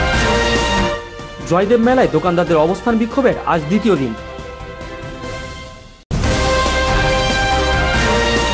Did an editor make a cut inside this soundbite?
no; 0 cuts

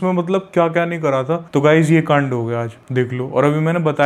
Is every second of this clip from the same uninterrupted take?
no; 1 cut; at 1.4 s

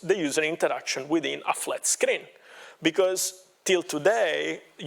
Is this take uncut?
yes; 0 cuts

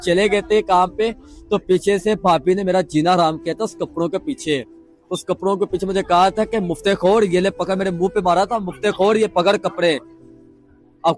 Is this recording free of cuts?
yes; 0 cuts

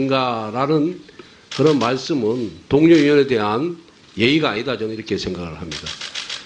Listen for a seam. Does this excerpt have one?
yes; 1 cut; at 4.3 s

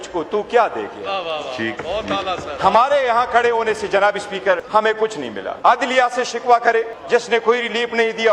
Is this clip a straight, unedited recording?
no; 2 cuts; at 4.9 s, 7.0 s

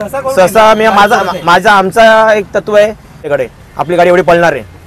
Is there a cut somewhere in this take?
yes; 1 cut; at 3.2 s

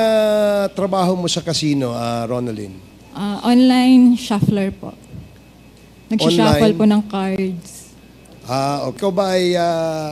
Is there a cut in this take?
yes; 1 cut; at 9.0 s

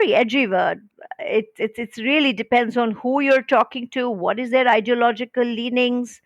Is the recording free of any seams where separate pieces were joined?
no; 1 cut; at 0.9 s

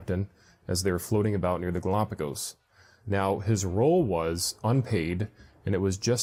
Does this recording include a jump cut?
no; 0 cuts

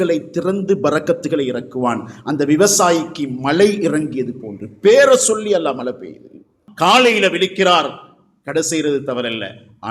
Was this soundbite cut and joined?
yes; 1 cut; at 6.6 s

